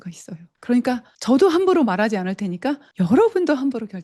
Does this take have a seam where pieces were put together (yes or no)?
yes